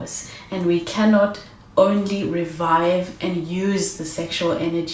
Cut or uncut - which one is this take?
uncut